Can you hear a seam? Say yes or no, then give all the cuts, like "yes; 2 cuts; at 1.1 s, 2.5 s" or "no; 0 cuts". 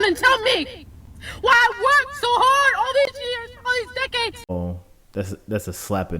yes; 1 cut; at 4.5 s